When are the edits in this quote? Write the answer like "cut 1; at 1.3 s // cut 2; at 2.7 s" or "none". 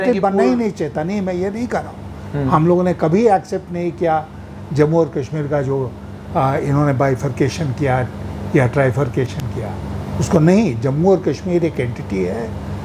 none